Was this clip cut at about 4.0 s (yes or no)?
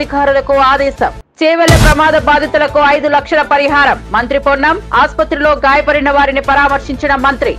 no